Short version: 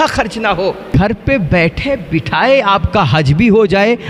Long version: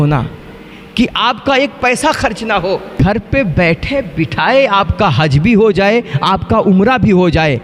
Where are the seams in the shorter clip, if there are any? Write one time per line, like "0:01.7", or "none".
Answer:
none

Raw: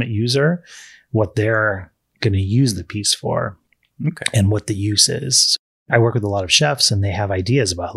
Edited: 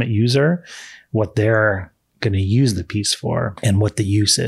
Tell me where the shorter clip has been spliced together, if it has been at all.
0:03.6

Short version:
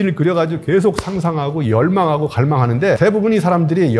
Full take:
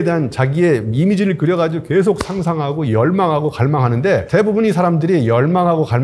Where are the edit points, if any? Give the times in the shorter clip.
0:03.0

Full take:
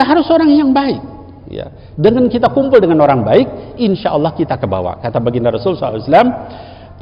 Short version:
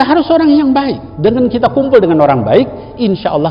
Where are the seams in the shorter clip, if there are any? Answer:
0:01.0

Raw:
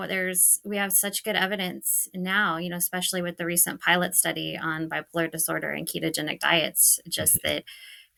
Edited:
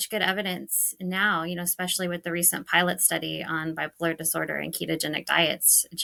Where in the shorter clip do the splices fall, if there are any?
none

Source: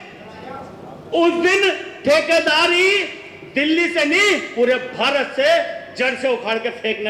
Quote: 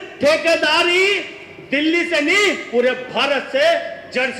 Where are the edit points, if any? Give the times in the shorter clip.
none

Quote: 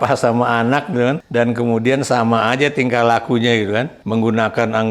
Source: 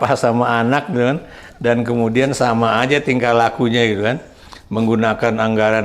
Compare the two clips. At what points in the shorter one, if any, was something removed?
0:01.2
0:04.0

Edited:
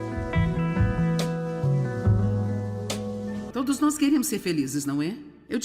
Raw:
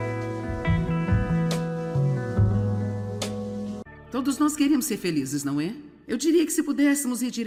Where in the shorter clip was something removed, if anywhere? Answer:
0:03.5

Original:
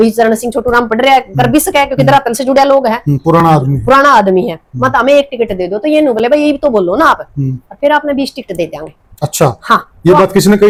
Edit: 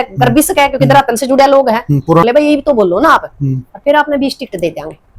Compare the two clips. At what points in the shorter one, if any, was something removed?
0:02.2

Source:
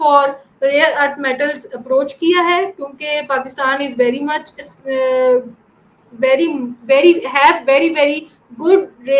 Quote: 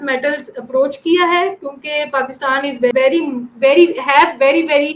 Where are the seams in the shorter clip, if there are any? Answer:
0:02.9

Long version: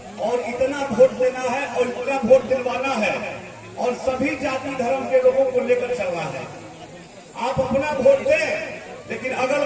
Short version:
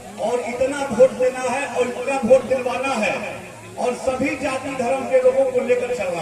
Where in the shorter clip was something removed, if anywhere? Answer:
none

